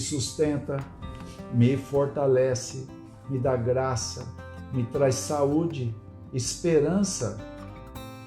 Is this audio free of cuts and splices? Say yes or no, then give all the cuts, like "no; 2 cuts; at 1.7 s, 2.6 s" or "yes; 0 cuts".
no; 1 cut; at 7.4 s